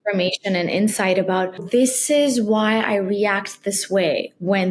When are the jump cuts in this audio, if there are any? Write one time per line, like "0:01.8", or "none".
0:01.6